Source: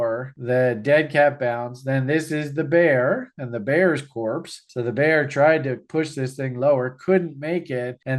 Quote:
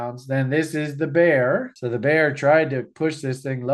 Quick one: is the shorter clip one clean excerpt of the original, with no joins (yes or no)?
no